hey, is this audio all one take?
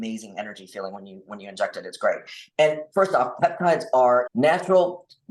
no; 1 cut; at 4.3 s

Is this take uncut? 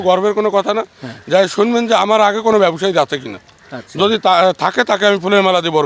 yes; 0 cuts

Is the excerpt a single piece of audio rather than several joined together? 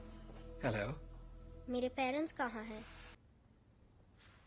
no; 1 cut; at 3.2 s

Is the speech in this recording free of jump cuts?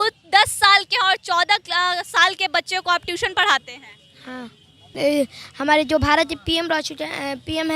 no; 1 cut; at 4.9 s

